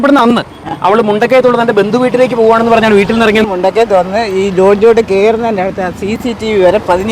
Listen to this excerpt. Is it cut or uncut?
cut